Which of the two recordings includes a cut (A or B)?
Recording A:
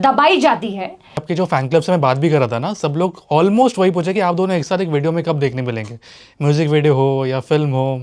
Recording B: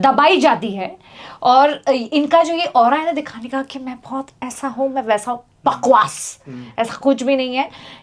A